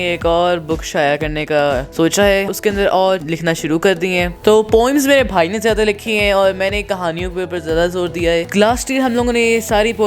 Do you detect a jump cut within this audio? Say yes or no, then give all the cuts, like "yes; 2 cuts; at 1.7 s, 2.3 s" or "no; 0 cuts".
yes; 5 cuts; at 1.9 s, 2.5 s, 3.2 s, 4.5 s, 8.4 s